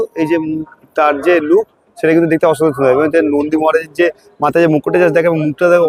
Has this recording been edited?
no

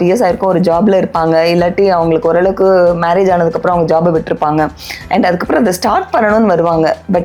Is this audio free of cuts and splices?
yes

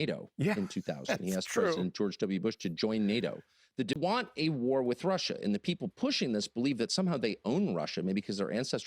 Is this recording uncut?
no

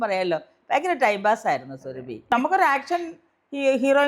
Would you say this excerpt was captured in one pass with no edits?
no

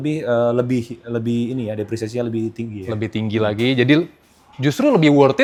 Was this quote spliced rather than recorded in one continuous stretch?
no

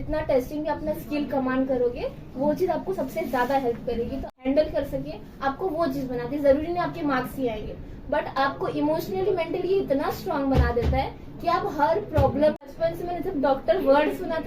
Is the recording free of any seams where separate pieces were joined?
no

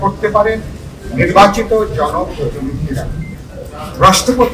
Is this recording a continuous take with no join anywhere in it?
no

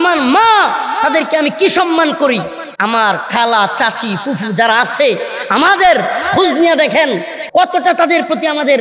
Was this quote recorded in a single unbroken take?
no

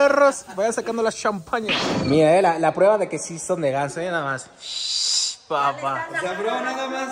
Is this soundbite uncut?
yes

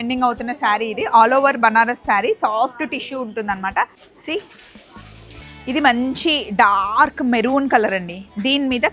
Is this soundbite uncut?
no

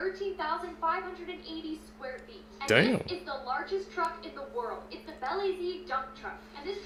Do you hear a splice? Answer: no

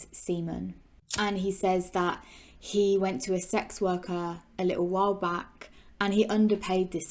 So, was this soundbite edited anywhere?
yes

